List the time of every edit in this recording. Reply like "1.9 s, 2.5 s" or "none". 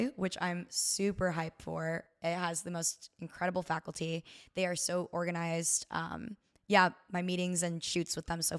none